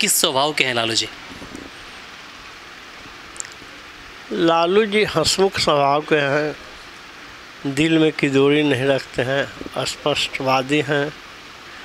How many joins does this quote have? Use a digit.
0